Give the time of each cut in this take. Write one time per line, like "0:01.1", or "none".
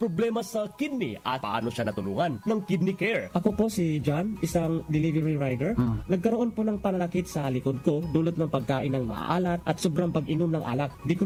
none

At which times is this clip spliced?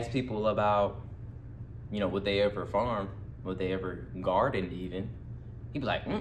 none

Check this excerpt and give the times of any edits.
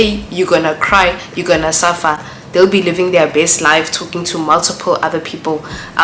none

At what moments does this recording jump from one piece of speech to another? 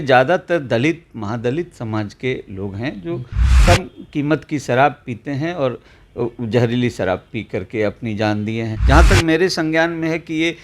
0:08.7

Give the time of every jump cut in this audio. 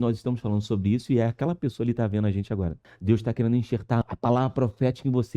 0:02.9
0:04.0

